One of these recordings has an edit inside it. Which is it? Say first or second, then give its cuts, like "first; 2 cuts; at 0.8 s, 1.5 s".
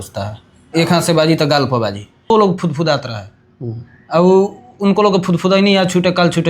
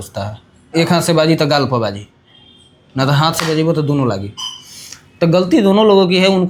first; 1 cut; at 2.3 s